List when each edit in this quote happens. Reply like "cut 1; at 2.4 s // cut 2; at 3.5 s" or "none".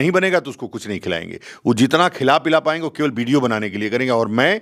none

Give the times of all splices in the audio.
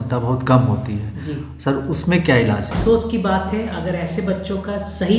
cut 1; at 2.7 s

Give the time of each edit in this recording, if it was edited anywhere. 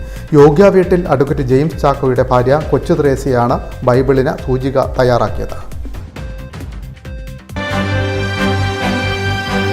cut 1; at 7.5 s

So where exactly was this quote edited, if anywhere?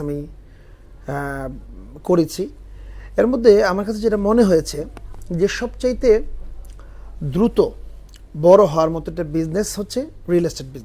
none

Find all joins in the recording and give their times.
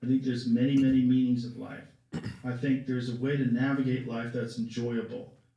none

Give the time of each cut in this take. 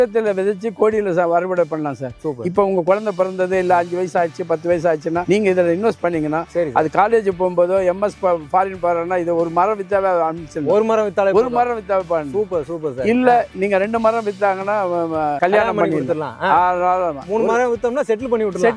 none

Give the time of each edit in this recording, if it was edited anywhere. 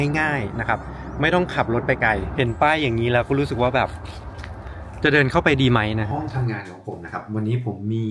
cut 1; at 2.3 s // cut 2; at 6.1 s

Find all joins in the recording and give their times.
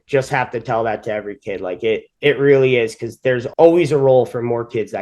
cut 1; at 3.5 s

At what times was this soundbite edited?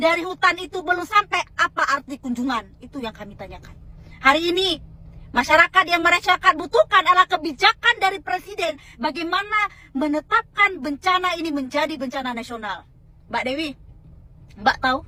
none

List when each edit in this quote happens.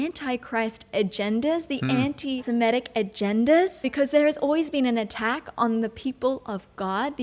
cut 1; at 2.4 s // cut 2; at 3.9 s

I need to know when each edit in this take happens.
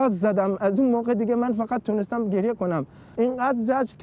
cut 1; at 3.0 s

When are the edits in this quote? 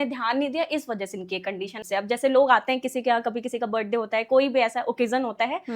cut 1; at 1.8 s

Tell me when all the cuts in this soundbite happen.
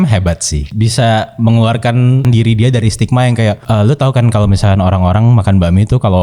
cut 1; at 0.7 s // cut 2; at 2.3 s // cut 3; at 3.6 s

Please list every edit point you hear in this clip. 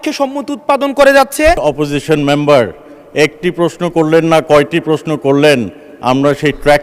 cut 1; at 1.6 s

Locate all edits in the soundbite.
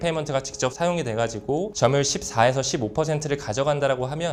none

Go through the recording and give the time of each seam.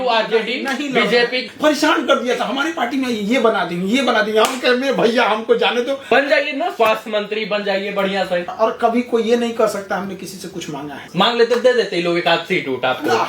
cut 1; at 1.4 s // cut 2; at 6.1 s // cut 3; at 8.5 s // cut 4; at 11.0 s

